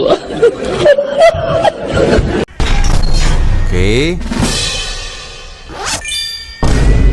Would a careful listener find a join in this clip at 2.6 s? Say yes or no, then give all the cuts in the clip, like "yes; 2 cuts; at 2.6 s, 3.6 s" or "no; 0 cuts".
yes; 1 cut; at 2.6 s